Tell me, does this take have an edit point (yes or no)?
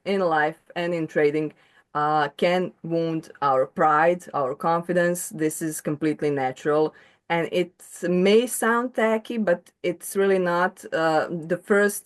no